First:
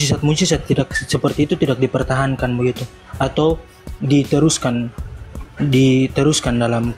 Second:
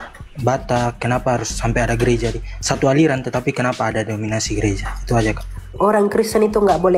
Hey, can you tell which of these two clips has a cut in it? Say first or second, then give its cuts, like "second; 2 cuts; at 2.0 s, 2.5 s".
second; 1 cut; at 5.7 s